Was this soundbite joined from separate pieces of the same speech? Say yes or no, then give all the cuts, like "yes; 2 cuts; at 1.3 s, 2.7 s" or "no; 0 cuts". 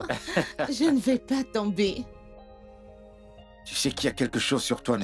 yes; 2 cuts; at 2.0 s, 3.7 s